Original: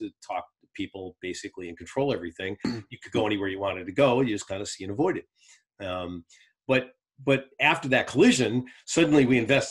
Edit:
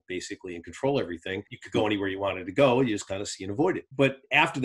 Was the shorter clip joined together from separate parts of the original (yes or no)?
yes